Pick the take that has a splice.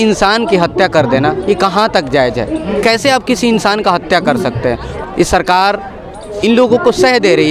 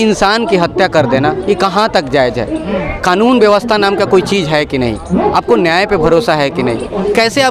first; 2 cuts; at 2.7 s, 4.9 s

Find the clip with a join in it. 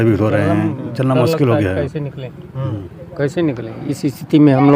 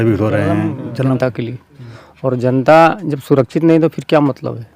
second; 1 cut; at 1.1 s

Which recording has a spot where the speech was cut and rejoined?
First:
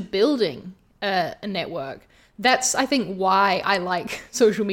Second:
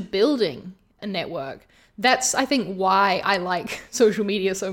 second; 1 cut; at 0.9 s

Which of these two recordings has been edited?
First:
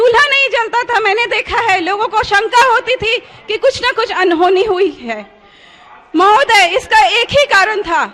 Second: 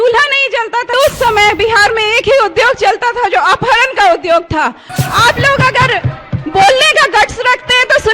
second; 2 cuts; at 0.9 s, 4.9 s

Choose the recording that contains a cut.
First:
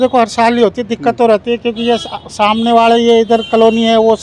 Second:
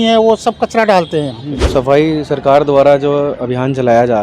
second; 1 cut; at 1.7 s

